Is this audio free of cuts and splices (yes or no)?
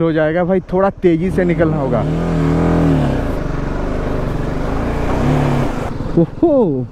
no